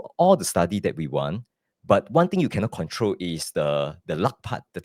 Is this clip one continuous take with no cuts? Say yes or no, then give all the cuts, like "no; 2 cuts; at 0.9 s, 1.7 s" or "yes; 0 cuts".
yes; 0 cuts